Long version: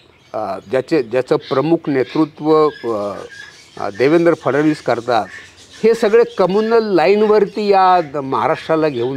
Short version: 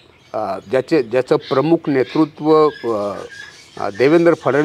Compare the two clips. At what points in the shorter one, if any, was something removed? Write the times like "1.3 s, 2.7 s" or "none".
none